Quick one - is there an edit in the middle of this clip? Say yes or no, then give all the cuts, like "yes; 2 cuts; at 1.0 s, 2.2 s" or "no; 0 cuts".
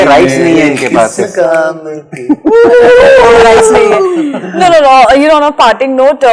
no; 0 cuts